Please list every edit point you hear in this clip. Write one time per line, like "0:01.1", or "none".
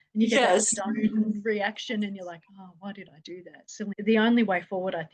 0:04.0

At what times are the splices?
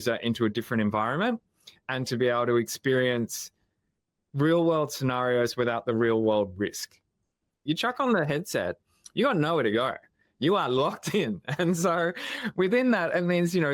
0:07.5

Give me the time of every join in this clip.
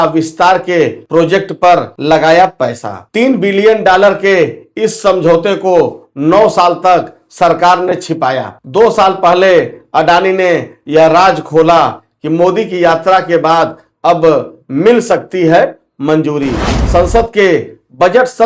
0:01.0
0:01.9

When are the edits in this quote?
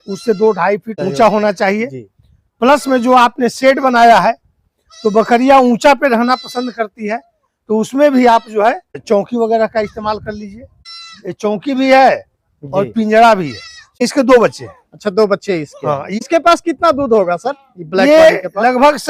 0:00.9
0:08.9
0:13.9

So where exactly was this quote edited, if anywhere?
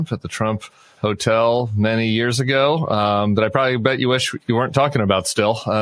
none

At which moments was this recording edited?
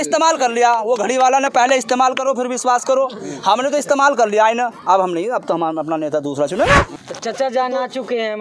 0:07.0

